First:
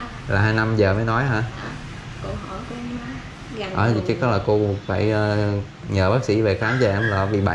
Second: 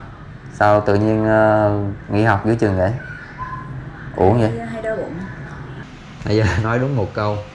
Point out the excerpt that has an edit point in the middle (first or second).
second